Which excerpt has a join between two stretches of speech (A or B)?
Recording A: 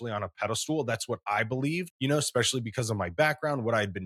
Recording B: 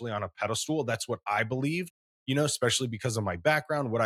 A